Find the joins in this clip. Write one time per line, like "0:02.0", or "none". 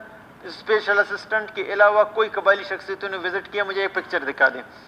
none